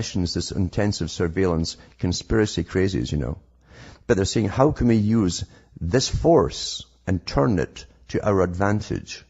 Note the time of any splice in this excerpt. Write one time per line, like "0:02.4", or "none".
0:01.8